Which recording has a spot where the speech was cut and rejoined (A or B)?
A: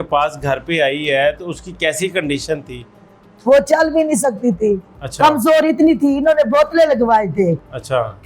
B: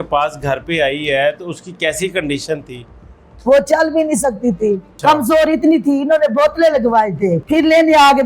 B